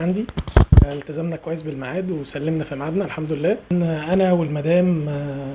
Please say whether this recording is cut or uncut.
cut